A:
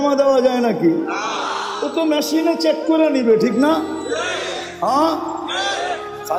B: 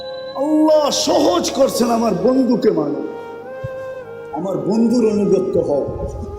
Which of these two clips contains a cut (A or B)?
B